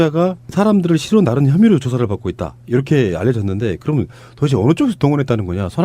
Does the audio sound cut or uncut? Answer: cut